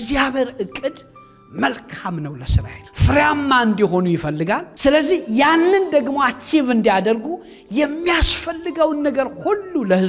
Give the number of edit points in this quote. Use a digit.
0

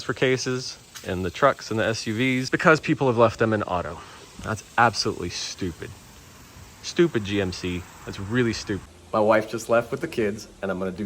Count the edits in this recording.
2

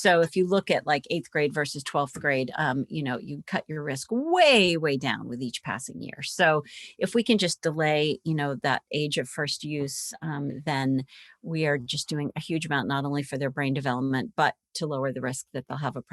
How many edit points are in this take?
0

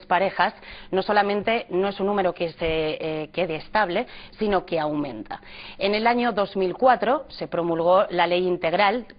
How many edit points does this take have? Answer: 1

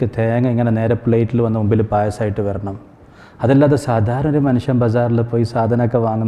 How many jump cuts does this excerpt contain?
0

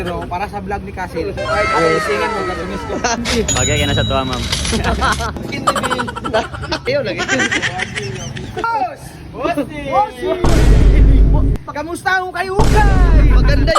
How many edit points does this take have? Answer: 4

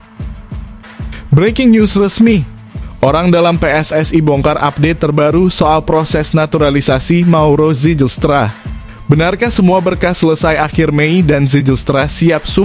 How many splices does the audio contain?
1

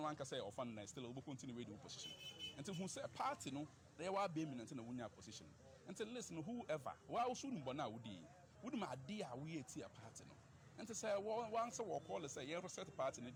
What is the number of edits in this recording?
0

